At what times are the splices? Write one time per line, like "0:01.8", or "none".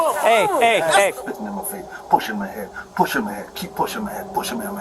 0:01.2